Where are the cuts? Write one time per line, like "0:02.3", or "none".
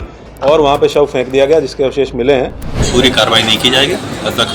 0:02.8

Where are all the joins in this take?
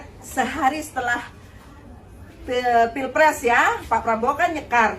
none

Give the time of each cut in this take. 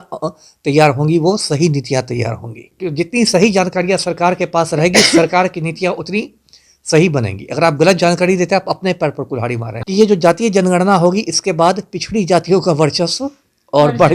0:02.7
0:09.7

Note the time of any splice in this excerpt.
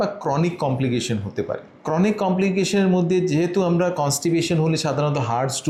none

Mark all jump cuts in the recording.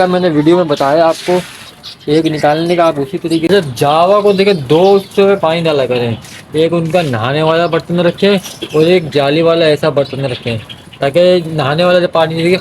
0:03.5

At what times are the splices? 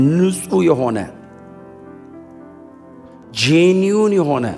0:01.1
0:02.7

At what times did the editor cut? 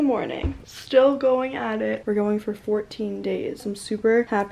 0:02.0
0:03.6

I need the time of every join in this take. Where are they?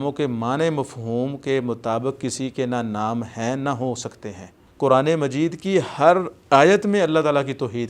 0:04.6

